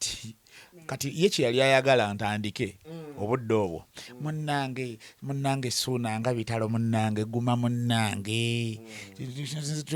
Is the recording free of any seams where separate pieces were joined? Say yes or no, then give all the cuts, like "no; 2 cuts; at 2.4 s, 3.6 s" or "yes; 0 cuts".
yes; 0 cuts